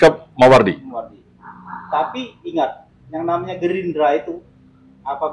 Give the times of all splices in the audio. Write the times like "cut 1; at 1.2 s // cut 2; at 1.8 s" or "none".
none